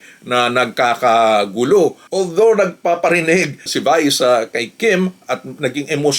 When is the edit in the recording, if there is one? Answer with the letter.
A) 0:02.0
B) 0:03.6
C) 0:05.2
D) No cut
A